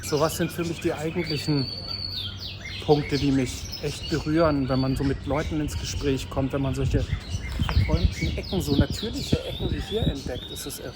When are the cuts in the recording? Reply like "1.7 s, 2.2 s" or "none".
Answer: none